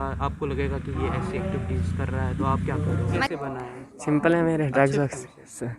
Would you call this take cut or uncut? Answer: cut